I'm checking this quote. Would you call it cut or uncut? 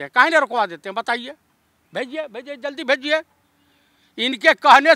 uncut